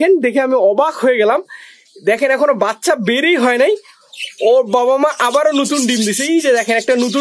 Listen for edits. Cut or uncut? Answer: uncut